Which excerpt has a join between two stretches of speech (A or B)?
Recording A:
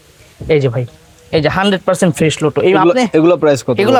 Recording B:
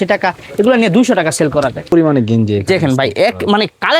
B